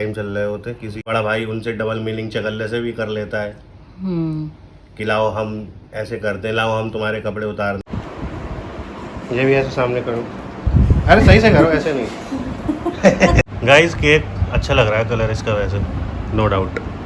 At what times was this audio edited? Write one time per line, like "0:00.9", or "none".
0:01.1
0:07.8
0:13.5